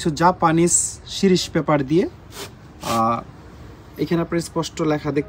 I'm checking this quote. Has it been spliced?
no; 0 cuts

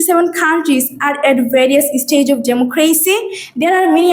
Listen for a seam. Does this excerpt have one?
no; 0 cuts

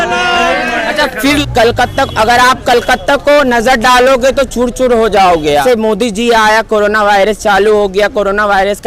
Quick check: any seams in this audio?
yes; 2 cuts; at 1.4 s, 5.6 s

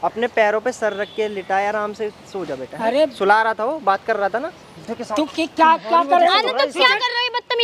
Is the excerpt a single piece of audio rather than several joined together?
no; 1 cut; at 4.8 s

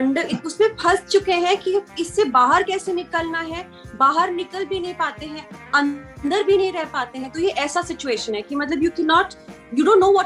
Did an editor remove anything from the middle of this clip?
no; 0 cuts

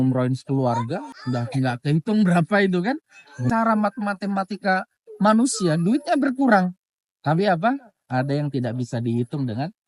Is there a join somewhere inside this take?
yes; 2 cuts; at 1.1 s, 3.4 s

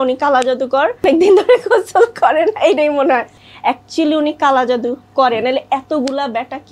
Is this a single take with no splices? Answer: no; 2 cuts; at 1.0 s, 3.4 s

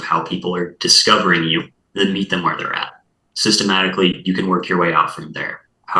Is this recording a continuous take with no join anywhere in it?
no; 1 cut; at 1.8 s

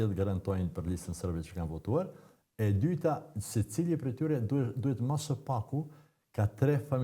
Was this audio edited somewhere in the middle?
no; 0 cuts

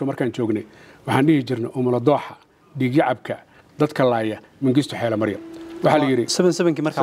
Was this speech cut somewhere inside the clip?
no; 0 cuts

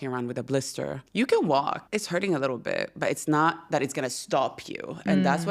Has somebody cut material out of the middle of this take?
yes; 2 cuts; at 1.0 s, 1.8 s

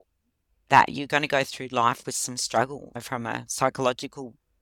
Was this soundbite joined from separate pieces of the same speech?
yes; 1 cut; at 2.9 s

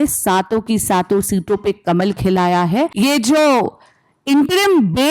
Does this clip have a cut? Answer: yes; 1 cut; at 2.9 s

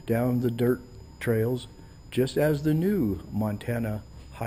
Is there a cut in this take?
no; 0 cuts

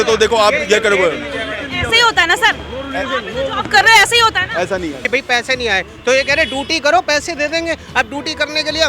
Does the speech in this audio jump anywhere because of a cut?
yes; 1 cut; at 5.0 s

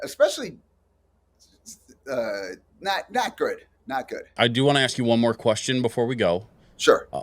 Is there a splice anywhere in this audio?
yes; 1 cut; at 4.2 s

